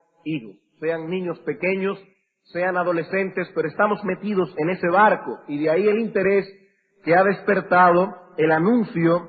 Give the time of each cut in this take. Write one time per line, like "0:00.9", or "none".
none